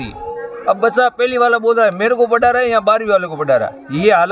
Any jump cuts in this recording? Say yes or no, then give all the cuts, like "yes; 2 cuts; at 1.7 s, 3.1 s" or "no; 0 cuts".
no; 0 cuts